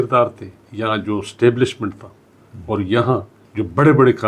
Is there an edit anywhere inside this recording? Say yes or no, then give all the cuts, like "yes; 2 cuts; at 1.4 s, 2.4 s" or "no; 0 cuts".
yes; 1 cut; at 3.4 s